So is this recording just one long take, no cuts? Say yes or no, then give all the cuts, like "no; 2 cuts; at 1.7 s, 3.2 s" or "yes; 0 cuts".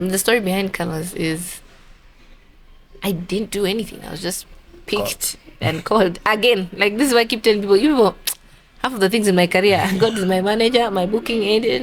yes; 0 cuts